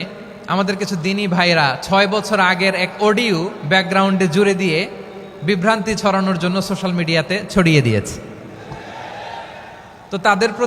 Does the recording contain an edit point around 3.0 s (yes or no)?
no